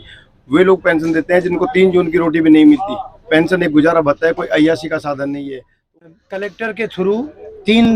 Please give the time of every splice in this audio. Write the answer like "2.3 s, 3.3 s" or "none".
6.2 s

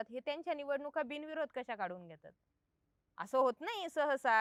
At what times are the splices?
none

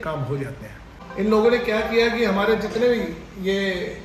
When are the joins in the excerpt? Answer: 1.0 s

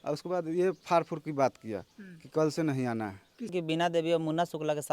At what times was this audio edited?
3.5 s

